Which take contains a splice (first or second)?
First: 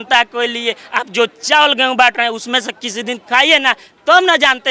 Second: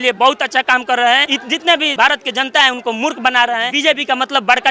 second